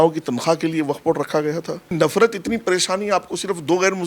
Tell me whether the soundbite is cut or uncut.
cut